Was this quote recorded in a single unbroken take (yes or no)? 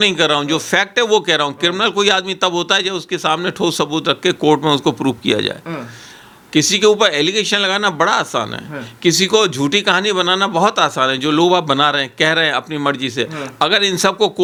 yes